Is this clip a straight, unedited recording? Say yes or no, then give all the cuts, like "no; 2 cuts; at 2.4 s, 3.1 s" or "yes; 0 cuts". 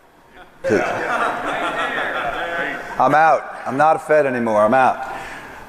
no; 1 cut; at 3.8 s